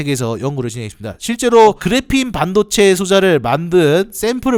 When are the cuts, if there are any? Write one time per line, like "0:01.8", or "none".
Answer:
none

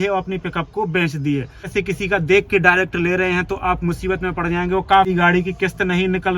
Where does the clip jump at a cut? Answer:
0:01.7
0:05.1

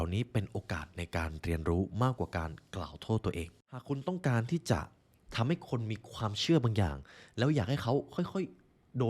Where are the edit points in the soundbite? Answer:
0:03.8

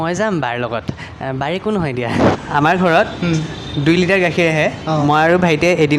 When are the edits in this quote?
0:02.3

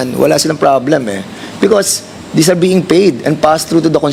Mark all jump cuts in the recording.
none

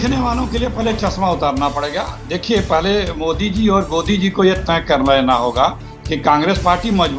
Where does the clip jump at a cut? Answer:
none

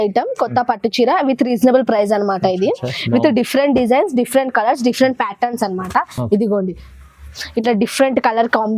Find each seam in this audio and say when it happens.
none

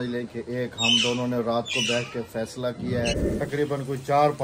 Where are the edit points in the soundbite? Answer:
0:03.2

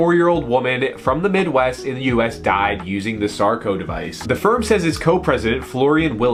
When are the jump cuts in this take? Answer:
none

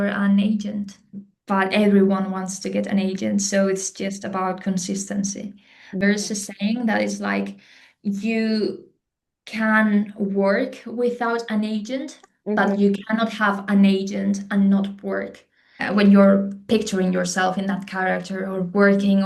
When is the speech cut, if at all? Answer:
0:01.3
0:06.0
0:15.8

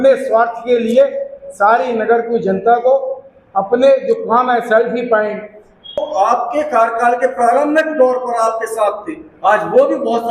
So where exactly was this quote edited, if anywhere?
0:06.0

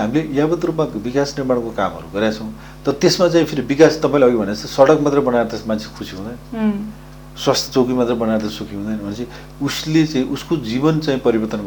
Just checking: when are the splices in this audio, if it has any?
none

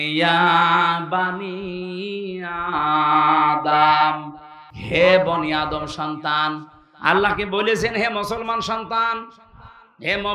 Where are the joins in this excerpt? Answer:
none

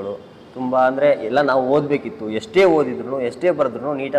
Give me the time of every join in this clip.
none

